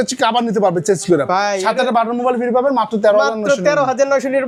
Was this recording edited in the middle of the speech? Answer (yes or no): no